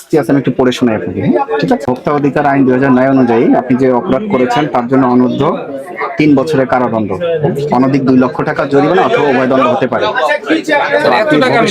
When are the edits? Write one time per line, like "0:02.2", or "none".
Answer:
0:01.8